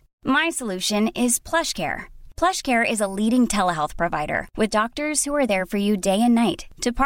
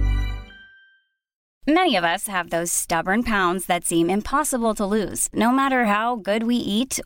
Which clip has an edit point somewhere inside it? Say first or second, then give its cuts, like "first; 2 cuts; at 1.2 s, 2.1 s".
second; 1 cut; at 1.5 s